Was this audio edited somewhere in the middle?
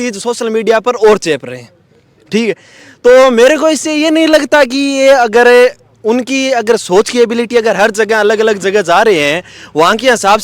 no; 0 cuts

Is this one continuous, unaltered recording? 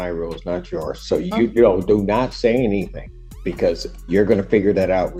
yes; 0 cuts

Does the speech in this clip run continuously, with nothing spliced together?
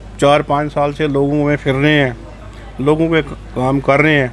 yes; 0 cuts

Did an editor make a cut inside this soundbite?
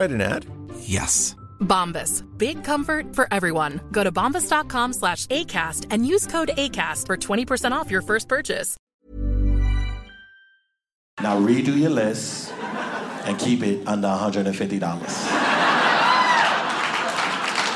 yes; 1 cut; at 11.1 s

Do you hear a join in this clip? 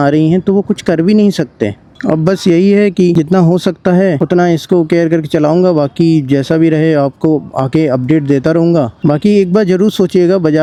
no; 0 cuts

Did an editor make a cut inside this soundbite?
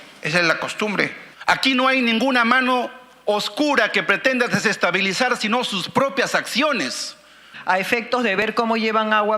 yes; 2 cuts; at 1.2 s, 7.4 s

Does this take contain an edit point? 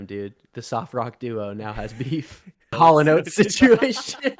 yes; 1 cut; at 2.8 s

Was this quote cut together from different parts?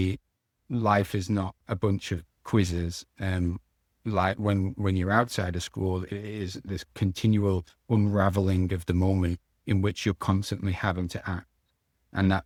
no; 0 cuts

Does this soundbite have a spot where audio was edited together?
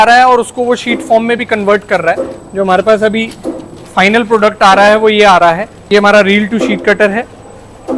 yes; 1 cut; at 5.7 s

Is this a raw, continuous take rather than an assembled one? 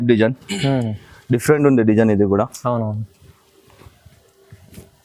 yes; 0 cuts

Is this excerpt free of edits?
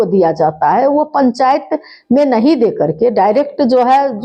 yes; 0 cuts

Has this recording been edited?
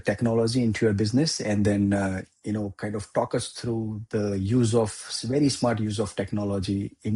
no; 0 cuts

